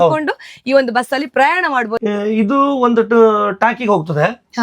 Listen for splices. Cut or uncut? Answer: cut